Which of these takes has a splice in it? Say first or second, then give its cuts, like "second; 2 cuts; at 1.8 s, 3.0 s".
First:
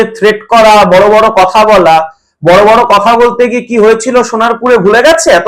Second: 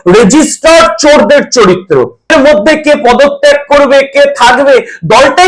second; 1 cut; at 2.3 s